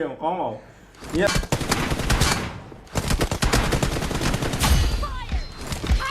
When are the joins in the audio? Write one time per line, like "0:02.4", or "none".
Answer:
0:01.3